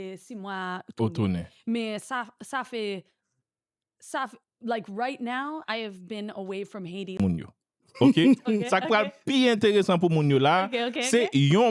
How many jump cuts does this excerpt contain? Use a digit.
1